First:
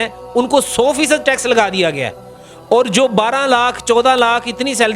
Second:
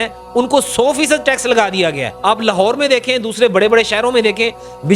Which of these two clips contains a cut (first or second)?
second